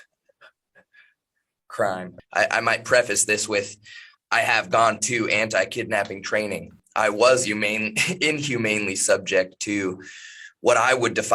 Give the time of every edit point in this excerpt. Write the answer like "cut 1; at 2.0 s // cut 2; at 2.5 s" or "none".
cut 1; at 2.1 s // cut 2; at 6.8 s